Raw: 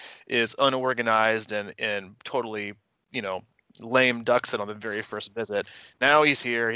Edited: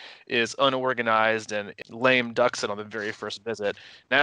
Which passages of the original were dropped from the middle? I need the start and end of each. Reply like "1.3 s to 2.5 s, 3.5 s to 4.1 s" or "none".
1.8 s to 3.7 s